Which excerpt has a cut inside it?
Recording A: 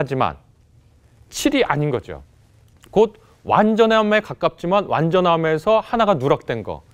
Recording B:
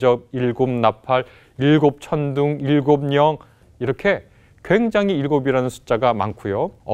B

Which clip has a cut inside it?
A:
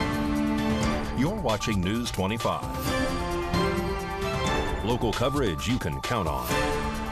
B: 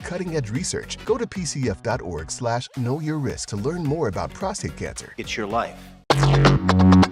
B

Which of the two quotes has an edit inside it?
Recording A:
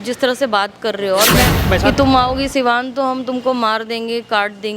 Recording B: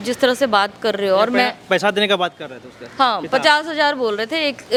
A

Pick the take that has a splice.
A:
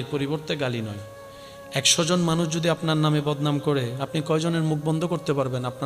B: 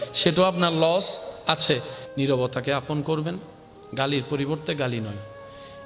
B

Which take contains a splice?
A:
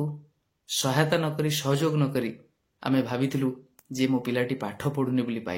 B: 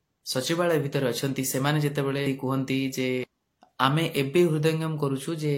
B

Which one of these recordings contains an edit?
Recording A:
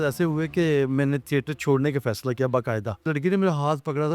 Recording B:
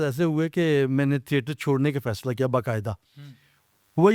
A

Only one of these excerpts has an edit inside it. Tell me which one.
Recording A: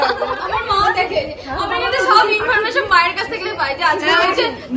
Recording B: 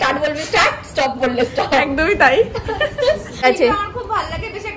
B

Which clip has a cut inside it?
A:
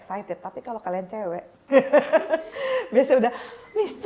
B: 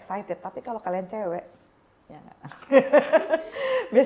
A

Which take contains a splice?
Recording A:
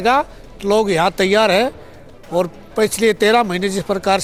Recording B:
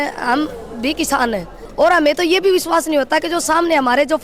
B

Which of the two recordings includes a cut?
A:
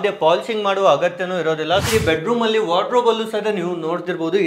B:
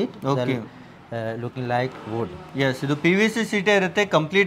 A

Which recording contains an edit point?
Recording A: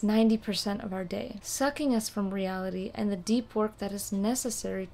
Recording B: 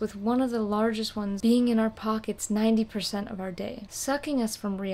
B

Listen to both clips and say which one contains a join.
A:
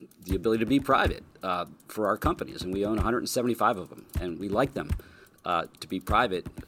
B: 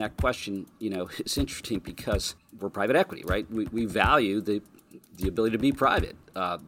B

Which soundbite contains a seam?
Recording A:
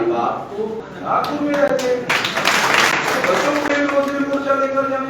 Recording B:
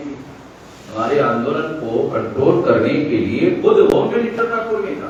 A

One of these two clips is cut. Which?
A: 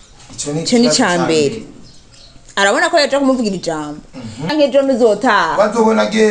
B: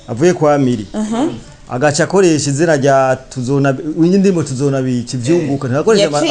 A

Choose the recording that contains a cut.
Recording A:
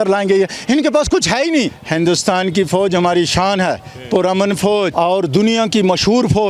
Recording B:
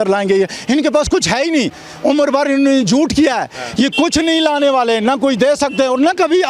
A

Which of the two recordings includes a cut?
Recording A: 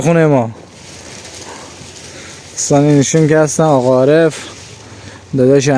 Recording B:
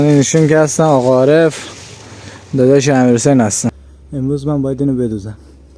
B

